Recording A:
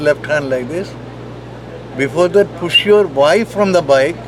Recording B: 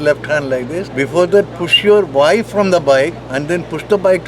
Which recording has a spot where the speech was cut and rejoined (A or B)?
B